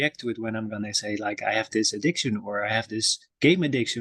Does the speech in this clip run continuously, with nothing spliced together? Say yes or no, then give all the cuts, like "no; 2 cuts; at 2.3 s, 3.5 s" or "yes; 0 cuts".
yes; 0 cuts